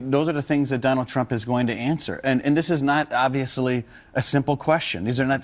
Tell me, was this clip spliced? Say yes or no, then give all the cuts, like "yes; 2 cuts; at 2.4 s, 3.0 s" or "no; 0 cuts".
no; 0 cuts